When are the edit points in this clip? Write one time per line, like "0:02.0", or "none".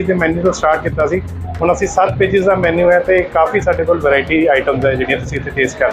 none